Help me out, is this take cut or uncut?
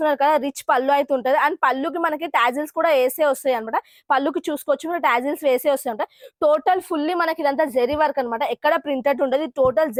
uncut